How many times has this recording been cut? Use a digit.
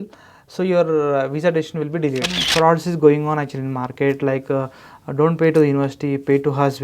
1